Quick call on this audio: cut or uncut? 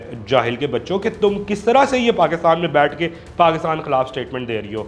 uncut